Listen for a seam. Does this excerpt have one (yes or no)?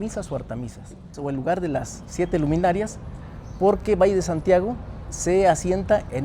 yes